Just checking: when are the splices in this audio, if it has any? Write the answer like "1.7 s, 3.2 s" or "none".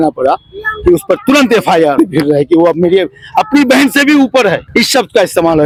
none